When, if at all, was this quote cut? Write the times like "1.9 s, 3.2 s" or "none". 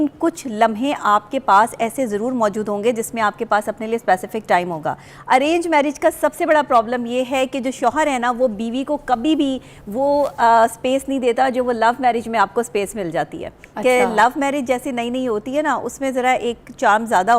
5.1 s